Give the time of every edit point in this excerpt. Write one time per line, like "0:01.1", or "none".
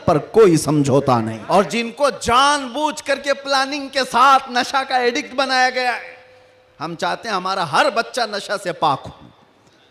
0:01.4